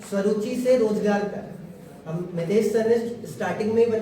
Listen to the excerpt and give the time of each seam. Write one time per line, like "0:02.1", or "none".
0:00.9